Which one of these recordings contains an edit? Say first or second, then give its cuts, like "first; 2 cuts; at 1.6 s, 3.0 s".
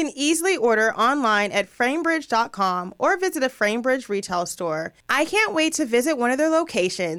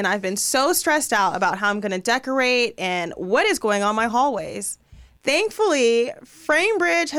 first; 1 cut; at 5.0 s